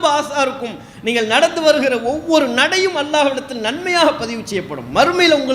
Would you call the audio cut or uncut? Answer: uncut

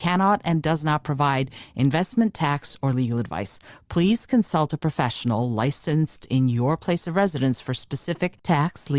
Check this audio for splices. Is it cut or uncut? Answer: uncut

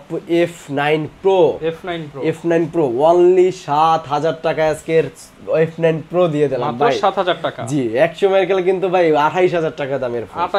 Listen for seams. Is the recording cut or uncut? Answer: uncut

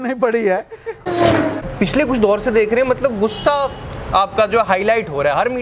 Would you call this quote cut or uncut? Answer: cut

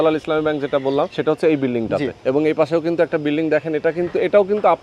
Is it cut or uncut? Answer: cut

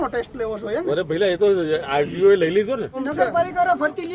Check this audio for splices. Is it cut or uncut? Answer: cut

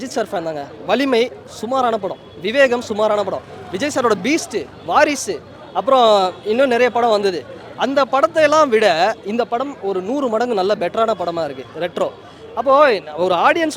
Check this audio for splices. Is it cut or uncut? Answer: uncut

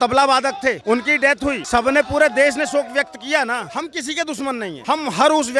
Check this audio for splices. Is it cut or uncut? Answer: cut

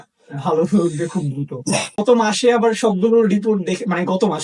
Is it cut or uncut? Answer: cut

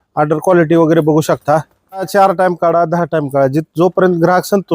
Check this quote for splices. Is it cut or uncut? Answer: cut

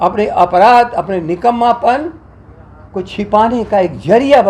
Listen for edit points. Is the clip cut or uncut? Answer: uncut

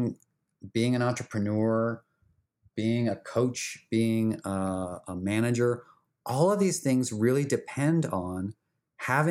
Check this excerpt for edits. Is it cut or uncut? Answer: cut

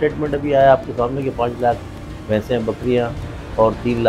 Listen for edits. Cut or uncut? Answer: uncut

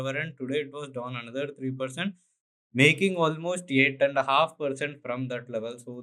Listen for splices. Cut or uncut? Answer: uncut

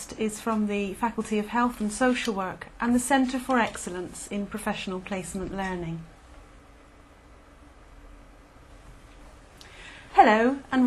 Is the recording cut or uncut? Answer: uncut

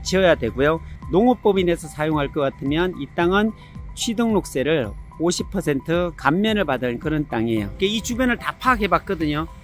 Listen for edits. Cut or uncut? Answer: cut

